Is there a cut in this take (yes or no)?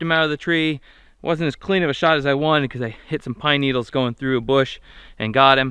no